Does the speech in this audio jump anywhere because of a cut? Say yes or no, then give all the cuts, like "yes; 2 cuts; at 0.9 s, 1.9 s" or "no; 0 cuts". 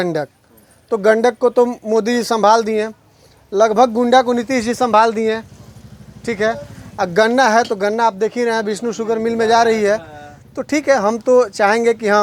no; 0 cuts